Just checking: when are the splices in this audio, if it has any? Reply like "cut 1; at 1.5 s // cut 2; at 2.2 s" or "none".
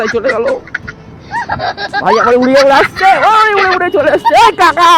none